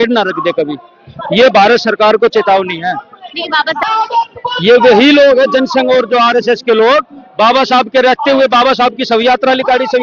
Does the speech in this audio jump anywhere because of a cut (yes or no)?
yes